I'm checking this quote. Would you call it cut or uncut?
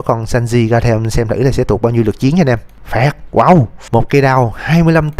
cut